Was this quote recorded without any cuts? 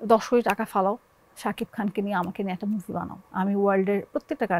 no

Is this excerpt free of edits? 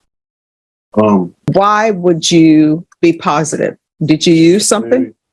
no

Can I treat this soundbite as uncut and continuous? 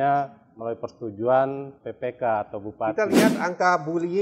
no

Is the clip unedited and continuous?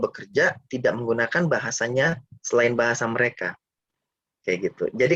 yes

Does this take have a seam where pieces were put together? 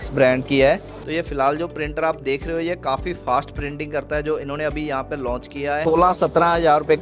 yes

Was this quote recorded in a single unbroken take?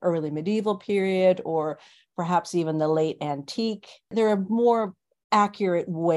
no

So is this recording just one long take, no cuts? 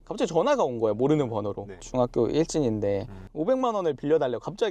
no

